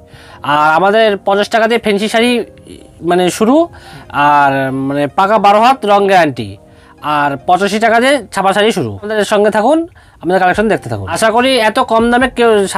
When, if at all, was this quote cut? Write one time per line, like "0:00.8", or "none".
0:09.1
0:11.0